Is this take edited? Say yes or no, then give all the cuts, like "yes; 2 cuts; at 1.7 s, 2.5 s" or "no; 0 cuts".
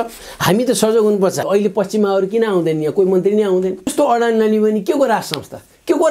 yes; 2 cuts; at 1.4 s, 3.9 s